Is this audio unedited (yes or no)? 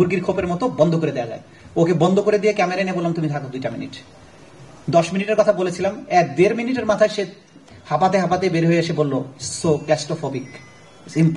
yes